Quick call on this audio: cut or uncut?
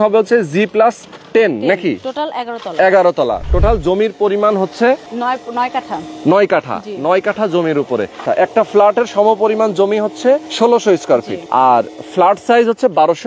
cut